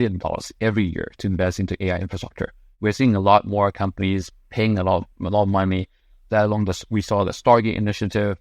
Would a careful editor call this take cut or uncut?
cut